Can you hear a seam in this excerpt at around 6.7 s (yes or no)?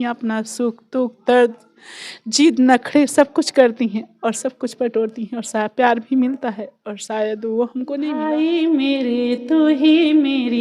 no